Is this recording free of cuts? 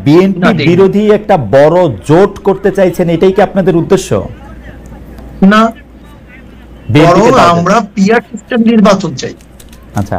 yes; 0 cuts

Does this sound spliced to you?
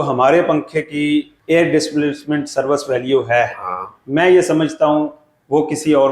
yes; 1 cut; at 1.3 s

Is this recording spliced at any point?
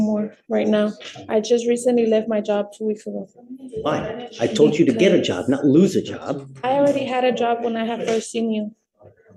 no; 0 cuts

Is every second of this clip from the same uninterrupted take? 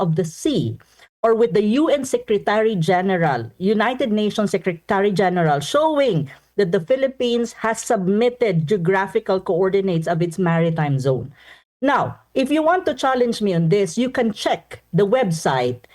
yes; 0 cuts

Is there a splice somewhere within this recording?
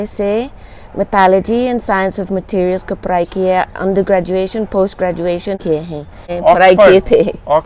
yes; 1 cut; at 6.0 s

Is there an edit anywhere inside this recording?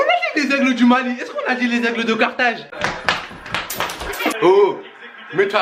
no; 0 cuts

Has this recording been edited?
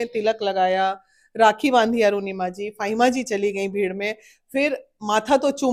no; 0 cuts

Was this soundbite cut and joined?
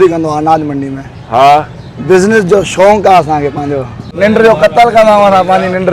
yes; 1 cut; at 4.1 s

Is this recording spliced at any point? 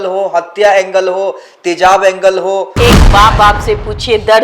yes; 1 cut; at 2.7 s

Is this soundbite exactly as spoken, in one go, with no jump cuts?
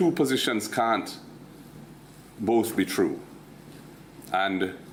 yes; 0 cuts

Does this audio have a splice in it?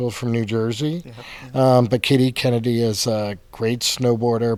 no; 0 cuts

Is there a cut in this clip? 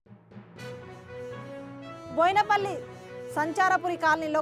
no; 0 cuts

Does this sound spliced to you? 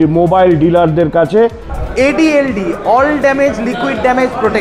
yes; 1 cut; at 1.7 s

